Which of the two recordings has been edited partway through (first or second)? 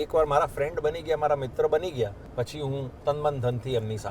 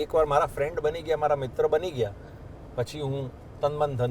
first